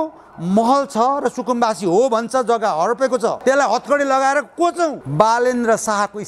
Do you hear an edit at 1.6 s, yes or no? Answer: no